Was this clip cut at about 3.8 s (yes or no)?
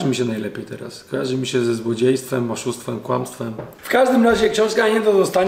yes